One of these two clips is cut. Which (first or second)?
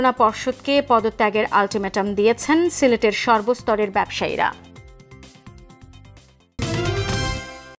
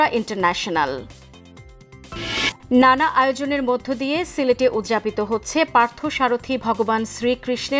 first